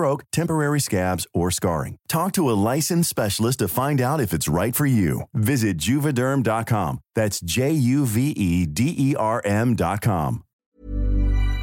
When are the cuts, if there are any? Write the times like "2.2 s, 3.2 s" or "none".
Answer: 10.6 s